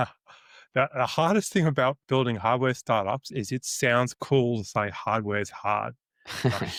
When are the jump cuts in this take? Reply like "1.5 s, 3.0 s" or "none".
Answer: none